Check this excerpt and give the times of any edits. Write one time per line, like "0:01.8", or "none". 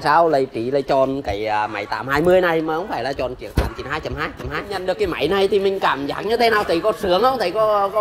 0:04.8